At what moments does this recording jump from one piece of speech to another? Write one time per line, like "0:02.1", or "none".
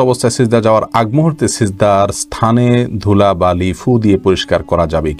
none

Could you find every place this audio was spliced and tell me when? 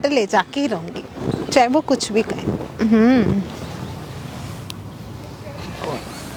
none

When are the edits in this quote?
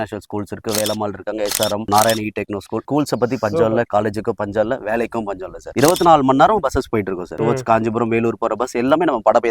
0:01.8
0:05.7
0:07.3

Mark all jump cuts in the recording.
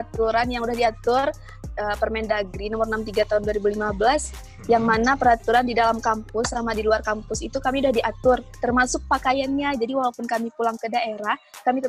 none

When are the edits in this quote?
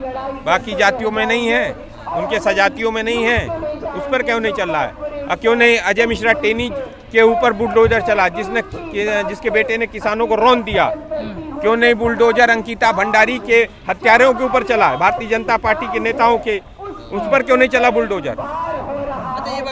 none

